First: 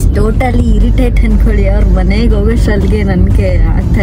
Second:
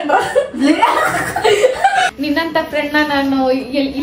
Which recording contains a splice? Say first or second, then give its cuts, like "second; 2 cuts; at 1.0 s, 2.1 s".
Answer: second; 1 cut; at 2.1 s